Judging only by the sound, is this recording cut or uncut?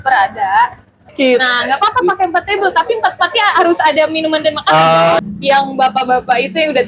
cut